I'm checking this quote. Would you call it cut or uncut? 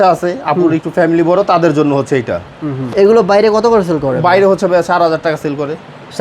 cut